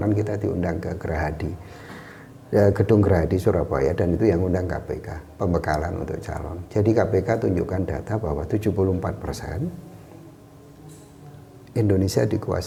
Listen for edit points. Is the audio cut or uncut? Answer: uncut